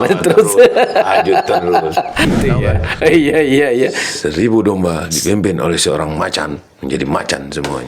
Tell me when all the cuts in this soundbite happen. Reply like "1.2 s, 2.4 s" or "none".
2.3 s

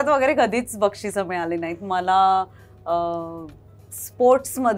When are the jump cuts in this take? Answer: none

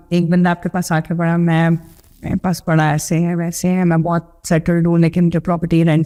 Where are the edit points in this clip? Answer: none

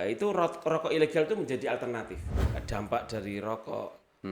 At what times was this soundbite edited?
2.2 s

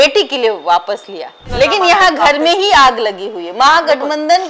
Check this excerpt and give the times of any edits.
1.4 s

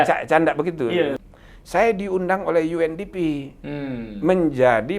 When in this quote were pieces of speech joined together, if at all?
1.3 s

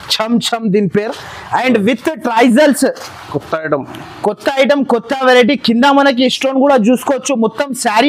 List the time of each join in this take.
none

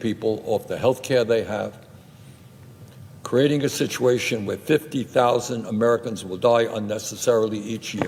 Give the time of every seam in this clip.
none

